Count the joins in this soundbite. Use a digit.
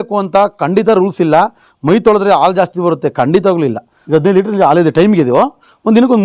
1